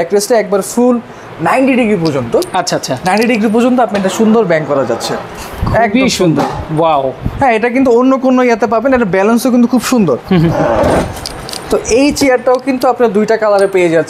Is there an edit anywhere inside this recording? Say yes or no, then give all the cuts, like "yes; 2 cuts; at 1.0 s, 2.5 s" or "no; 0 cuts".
no; 0 cuts